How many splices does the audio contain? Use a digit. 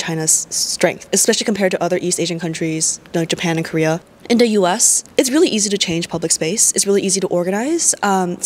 2